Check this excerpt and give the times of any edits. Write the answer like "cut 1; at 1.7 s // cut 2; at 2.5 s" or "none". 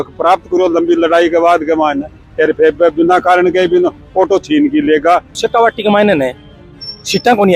cut 1; at 5.4 s